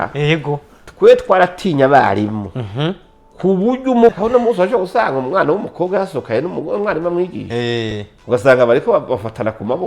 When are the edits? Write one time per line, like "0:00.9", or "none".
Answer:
0:04.1